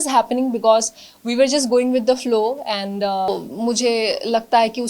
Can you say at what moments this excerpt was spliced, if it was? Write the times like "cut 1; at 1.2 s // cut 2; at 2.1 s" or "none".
cut 1; at 3.3 s